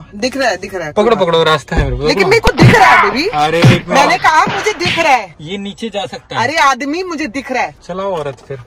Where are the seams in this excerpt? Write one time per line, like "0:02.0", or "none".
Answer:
none